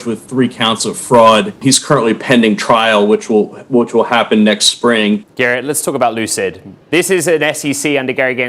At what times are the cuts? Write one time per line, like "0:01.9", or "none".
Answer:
0:01.6
0:05.3